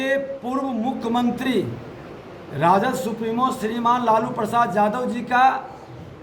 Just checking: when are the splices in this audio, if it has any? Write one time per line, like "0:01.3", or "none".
none